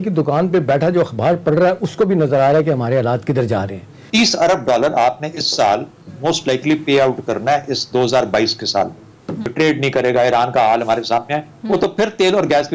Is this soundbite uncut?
no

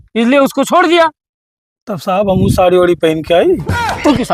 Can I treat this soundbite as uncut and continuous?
yes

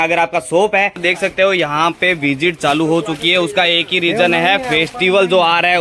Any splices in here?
yes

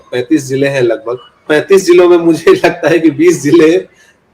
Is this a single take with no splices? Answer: no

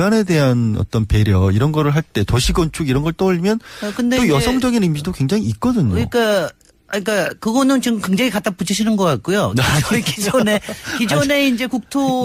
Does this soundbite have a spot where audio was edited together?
no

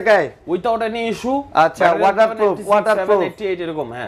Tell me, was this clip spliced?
no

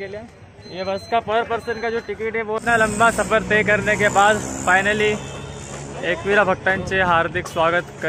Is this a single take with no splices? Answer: no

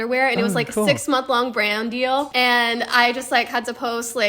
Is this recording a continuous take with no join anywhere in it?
no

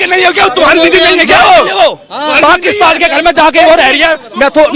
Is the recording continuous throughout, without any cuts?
yes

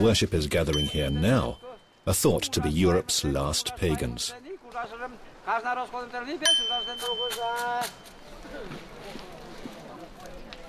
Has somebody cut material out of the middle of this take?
yes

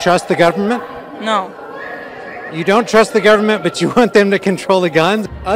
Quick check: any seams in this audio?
no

